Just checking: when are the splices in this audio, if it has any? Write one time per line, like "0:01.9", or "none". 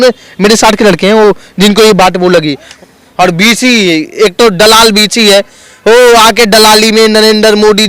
0:02.7